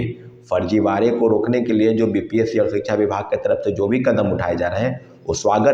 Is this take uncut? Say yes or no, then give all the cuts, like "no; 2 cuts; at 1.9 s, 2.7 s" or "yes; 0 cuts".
yes; 0 cuts